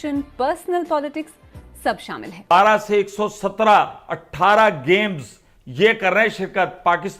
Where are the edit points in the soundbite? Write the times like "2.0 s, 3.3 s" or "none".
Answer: 2.5 s